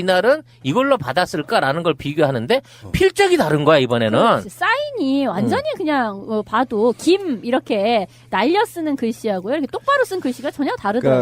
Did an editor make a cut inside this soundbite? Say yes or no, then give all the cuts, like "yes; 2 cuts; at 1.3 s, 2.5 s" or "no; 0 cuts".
yes; 1 cut; at 3.8 s